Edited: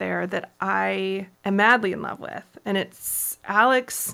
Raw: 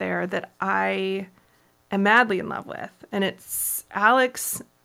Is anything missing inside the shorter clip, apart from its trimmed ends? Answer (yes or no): yes